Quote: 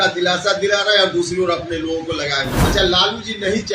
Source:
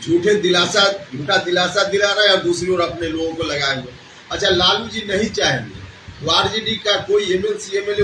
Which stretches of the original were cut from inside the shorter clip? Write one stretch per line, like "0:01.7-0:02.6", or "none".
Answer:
0:03.9-0:04.2